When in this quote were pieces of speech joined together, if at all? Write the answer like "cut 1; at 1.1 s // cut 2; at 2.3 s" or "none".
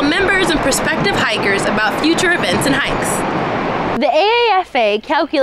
cut 1; at 3.9 s